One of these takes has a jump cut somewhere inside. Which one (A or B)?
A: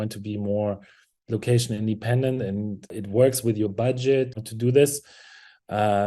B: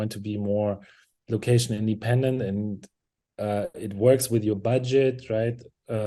A